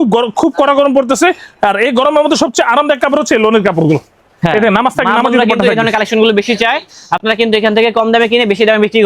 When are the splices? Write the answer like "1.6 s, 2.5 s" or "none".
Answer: none